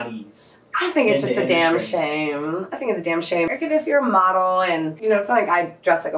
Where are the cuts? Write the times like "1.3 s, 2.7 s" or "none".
3.5 s, 4.9 s